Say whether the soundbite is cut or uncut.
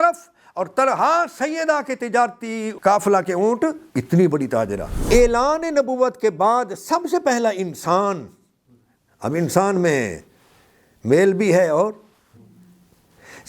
cut